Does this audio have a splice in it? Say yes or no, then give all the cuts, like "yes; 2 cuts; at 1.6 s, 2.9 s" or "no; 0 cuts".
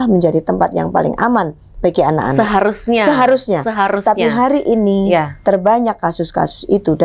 no; 0 cuts